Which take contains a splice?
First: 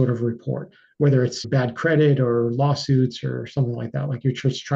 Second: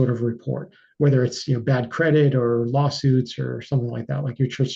first; 1 cut; at 1.4 s

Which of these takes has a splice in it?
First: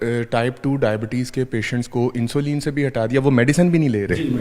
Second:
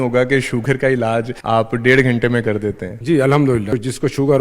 second; 3 cuts; at 1.3 s, 2.9 s, 3.7 s

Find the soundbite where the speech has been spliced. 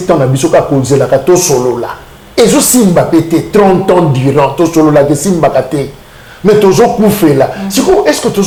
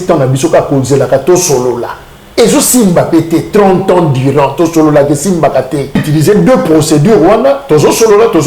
second; 1 cut; at 6.0 s

